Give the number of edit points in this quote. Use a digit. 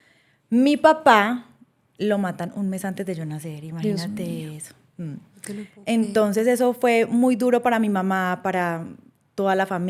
0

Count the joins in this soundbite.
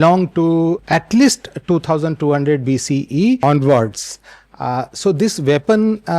2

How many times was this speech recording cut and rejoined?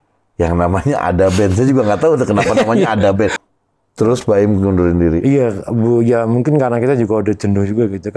1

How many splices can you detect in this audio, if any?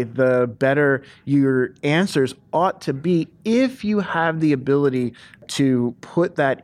1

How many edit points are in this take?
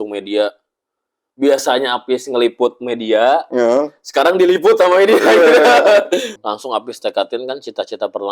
1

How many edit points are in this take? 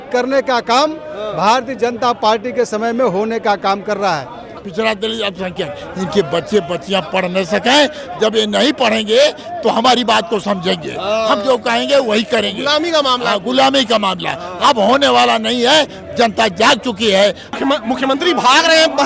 2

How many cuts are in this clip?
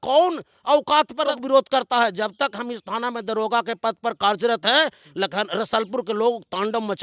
1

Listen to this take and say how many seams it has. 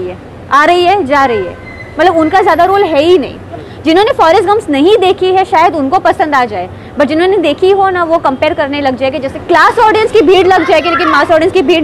2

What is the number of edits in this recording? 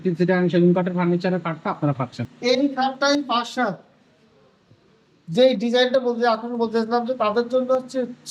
1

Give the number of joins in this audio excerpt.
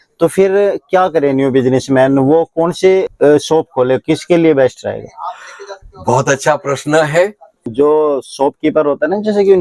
2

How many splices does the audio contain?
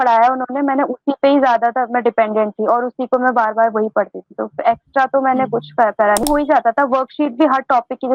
1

